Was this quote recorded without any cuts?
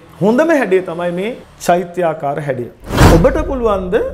no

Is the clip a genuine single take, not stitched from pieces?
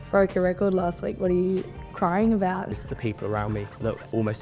no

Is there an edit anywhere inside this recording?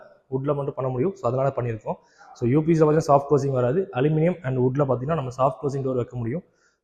no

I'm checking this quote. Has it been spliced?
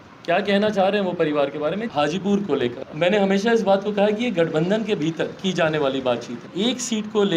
yes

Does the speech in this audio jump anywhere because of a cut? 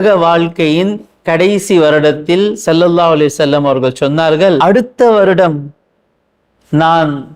yes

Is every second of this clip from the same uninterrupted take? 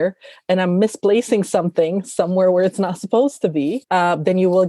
yes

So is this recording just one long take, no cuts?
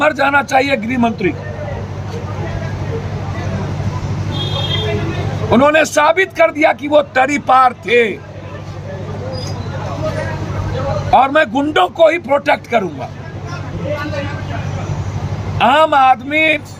yes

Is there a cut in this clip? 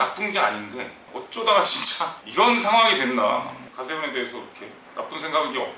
yes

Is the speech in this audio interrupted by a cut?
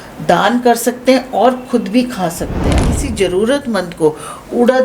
yes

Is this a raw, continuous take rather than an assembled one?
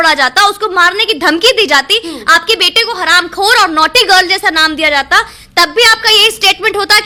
yes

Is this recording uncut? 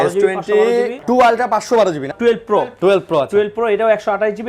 no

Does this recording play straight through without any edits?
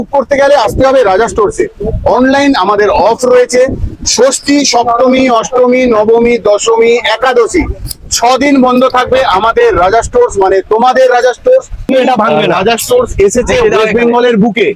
no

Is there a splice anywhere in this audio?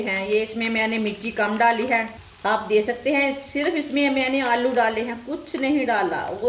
yes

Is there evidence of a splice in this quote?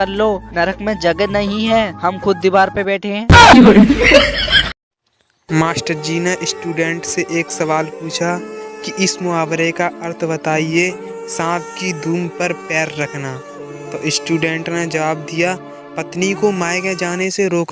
yes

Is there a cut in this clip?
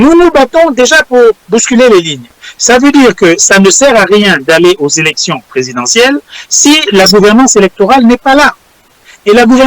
no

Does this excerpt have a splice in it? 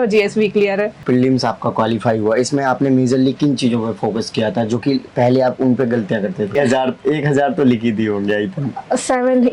yes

